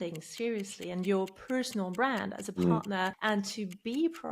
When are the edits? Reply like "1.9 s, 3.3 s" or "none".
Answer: 3.2 s